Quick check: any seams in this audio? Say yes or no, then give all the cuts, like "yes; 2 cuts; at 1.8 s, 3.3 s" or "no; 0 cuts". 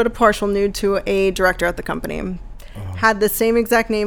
no; 0 cuts